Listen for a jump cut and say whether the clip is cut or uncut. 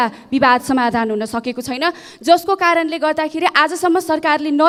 uncut